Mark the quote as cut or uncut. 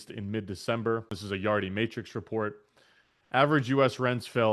cut